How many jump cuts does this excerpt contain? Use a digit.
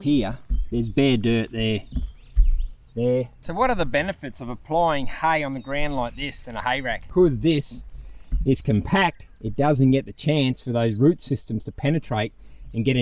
2